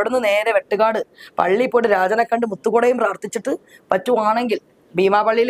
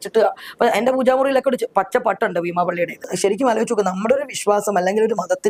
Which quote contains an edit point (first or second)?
second